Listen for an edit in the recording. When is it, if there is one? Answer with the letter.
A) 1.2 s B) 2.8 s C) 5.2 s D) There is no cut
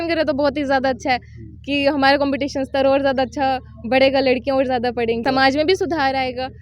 C